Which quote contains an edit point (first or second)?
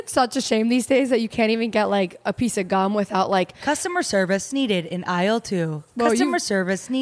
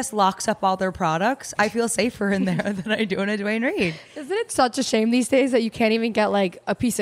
first